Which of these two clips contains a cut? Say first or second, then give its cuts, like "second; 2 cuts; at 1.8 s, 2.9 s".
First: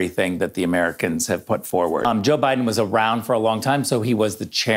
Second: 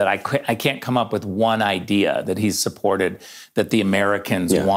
first; 1 cut; at 2.1 s